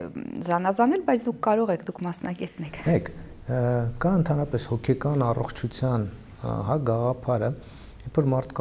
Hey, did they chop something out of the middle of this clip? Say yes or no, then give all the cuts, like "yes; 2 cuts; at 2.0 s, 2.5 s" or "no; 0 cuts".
no; 0 cuts